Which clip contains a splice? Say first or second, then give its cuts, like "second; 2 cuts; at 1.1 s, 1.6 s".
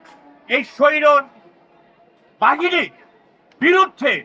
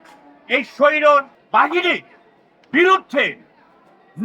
second; 1 cut; at 1.4 s